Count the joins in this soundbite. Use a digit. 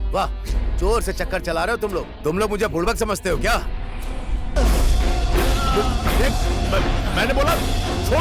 1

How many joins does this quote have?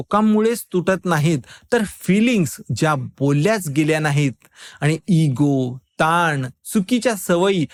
0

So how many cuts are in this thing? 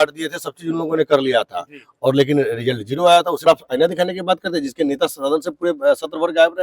1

